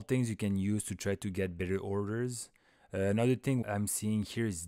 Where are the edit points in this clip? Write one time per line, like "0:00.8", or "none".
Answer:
0:03.6